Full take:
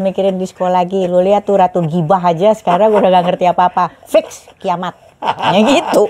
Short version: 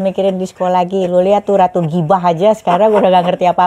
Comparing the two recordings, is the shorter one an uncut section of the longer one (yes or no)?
yes